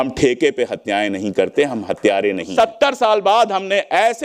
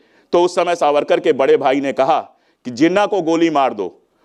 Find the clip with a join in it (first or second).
first